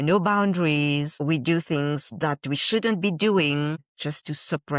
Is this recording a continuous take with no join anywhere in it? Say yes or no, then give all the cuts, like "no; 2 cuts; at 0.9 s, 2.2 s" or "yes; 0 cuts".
no; 3 cuts; at 1.1 s, 2.1 s, 3.9 s